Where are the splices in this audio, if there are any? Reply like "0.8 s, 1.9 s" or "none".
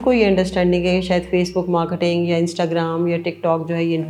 none